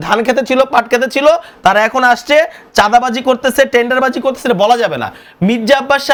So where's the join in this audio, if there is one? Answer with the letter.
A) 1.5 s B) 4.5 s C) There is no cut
C